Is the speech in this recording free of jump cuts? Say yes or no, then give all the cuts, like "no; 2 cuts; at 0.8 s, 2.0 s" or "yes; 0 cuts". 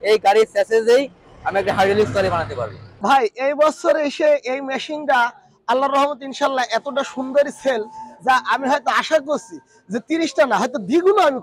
no; 1 cut; at 2.9 s